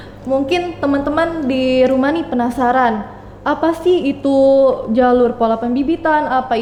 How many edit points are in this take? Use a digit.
0